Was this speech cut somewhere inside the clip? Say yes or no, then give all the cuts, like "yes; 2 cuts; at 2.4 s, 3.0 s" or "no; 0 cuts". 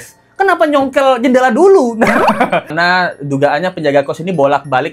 yes; 1 cut; at 2.7 s